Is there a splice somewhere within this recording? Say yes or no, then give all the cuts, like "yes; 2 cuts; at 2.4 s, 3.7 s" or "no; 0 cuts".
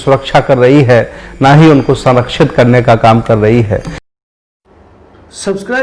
yes; 1 cut; at 4.0 s